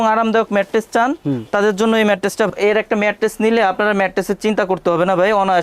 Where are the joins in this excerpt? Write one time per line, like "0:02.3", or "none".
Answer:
0:02.5

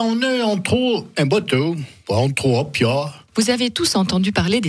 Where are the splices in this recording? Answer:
none

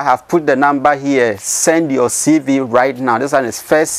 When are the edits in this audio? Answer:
none

